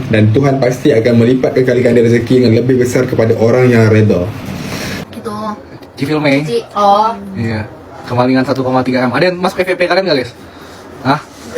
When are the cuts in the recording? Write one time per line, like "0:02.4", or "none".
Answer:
0:05.1